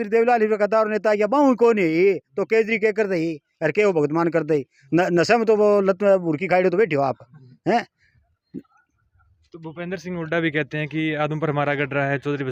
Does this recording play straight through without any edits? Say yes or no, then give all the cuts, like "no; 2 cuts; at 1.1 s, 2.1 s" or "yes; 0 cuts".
yes; 0 cuts